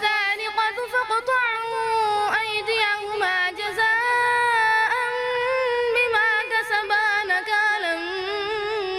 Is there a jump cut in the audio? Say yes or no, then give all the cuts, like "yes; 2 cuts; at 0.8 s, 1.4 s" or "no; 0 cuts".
no; 0 cuts